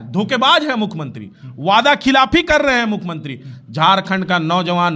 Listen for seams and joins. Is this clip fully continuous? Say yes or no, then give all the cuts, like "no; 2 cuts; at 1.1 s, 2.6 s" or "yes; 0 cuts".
yes; 0 cuts